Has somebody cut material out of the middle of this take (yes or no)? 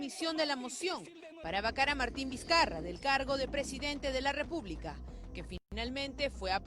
yes